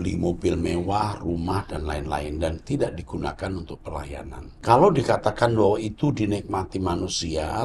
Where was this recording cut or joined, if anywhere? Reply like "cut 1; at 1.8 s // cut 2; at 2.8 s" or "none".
cut 1; at 4.4 s